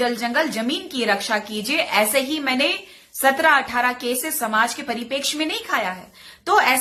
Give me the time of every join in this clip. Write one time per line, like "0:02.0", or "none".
none